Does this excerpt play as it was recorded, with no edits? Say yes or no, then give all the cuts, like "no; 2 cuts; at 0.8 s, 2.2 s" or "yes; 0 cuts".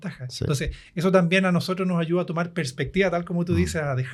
yes; 0 cuts